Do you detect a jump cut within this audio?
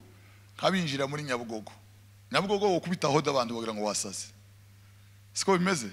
no; 0 cuts

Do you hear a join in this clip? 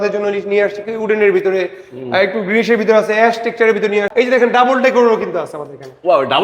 yes; 1 cut; at 4.1 s

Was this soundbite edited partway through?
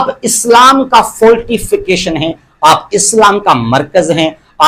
no; 0 cuts

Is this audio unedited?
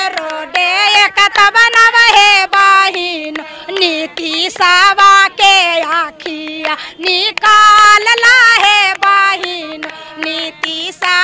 yes; 0 cuts

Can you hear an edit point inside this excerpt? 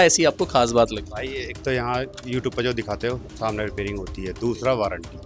no; 0 cuts

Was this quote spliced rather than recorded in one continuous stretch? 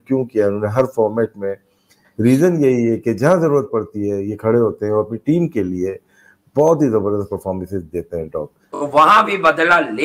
yes; 1 cut; at 8.6 s

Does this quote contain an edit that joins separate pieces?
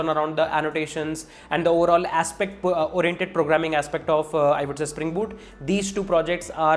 no; 0 cuts

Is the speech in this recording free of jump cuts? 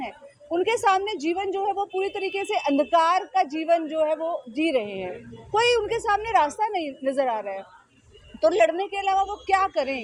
yes; 0 cuts

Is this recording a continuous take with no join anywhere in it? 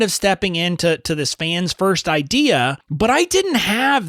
no; 1 cut; at 2.8 s

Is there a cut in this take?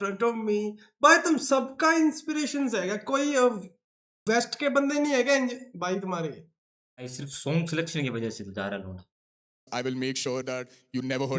yes; 1 cut; at 7.2 s

